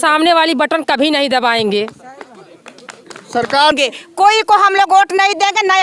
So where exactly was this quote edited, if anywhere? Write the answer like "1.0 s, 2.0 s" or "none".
3.7 s